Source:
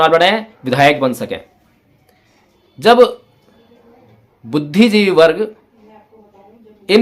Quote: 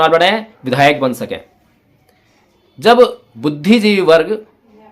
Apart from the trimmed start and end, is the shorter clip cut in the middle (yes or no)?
yes